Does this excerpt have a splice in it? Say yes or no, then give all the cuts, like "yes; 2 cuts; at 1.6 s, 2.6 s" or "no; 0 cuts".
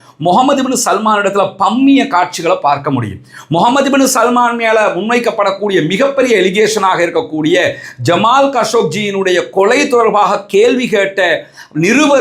no; 0 cuts